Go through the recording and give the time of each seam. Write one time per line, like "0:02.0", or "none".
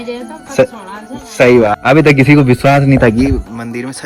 0:01.8